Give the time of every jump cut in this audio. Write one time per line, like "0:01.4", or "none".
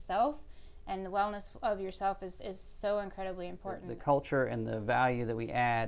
0:03.9